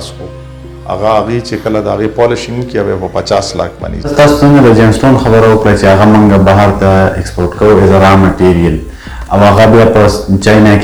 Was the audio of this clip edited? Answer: no; 0 cuts

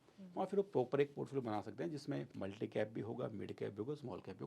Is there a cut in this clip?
yes; 1 cut; at 2.3 s

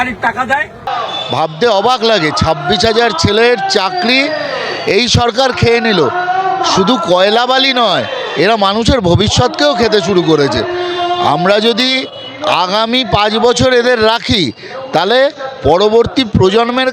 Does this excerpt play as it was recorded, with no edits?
no; 1 cut; at 1.0 s

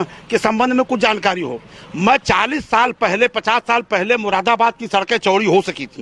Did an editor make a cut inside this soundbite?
no; 0 cuts

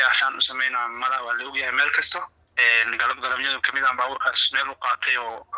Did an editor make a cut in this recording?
yes; 1 cut; at 2.4 s

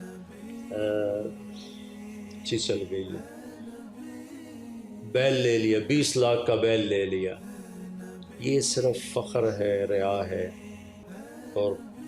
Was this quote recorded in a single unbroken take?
yes; 0 cuts

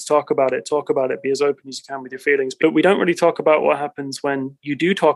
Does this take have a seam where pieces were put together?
yes; 1 cut; at 2.5 s

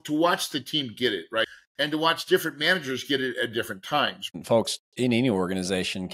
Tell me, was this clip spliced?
yes; 2 cuts; at 1.4 s, 4.3 s

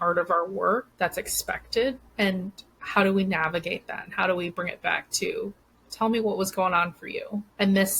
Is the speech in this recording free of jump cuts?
yes; 0 cuts

